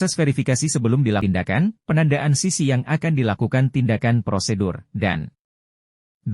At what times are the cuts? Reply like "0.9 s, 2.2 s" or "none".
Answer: 1.2 s